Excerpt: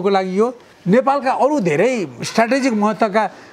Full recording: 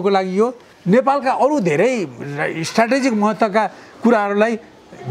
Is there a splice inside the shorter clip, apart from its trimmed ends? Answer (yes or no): yes